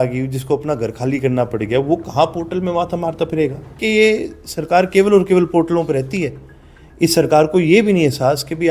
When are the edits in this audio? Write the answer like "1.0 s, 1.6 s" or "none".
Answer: 3.7 s